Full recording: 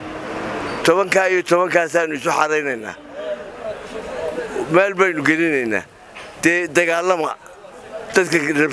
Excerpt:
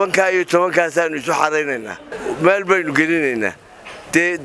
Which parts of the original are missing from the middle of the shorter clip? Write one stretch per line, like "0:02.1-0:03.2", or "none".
0:03.1-0:04.4